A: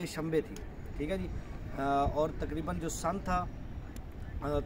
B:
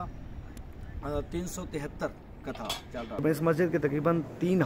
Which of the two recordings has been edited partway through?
B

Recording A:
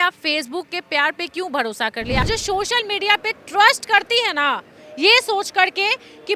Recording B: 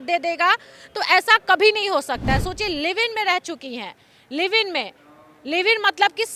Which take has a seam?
A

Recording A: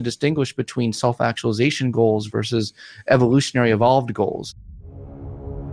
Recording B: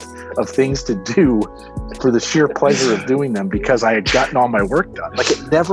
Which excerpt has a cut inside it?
A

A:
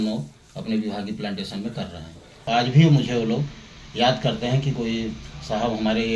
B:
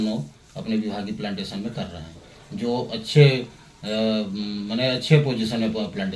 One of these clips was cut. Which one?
A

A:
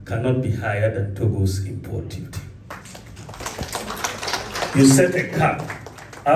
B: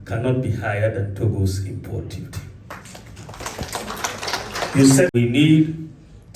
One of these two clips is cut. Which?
B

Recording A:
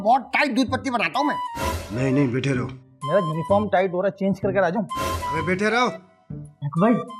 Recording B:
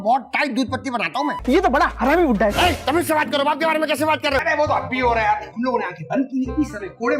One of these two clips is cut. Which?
B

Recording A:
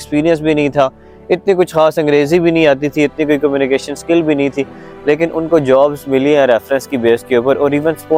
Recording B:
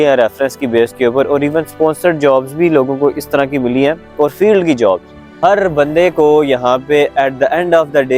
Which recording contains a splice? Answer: B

